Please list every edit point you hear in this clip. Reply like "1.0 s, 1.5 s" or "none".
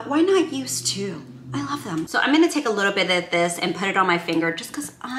2.1 s